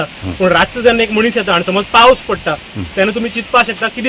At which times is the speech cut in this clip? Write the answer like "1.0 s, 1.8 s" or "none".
none